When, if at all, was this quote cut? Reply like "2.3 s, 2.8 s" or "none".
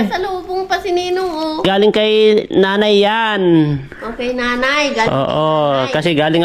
1.6 s